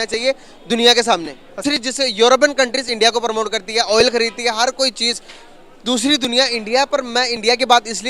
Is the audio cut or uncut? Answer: cut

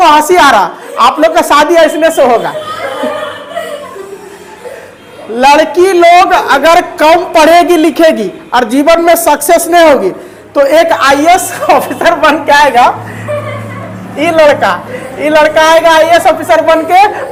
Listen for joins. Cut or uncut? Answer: uncut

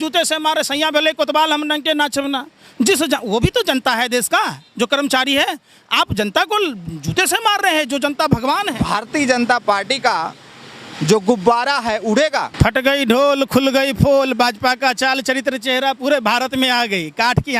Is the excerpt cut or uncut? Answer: cut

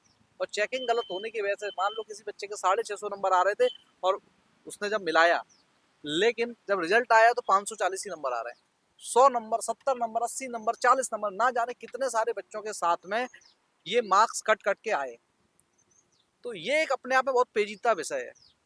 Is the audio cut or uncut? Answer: uncut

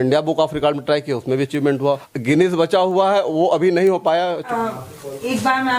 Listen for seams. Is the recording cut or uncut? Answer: cut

